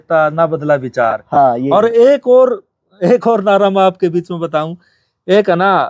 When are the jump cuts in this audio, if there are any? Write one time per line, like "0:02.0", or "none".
none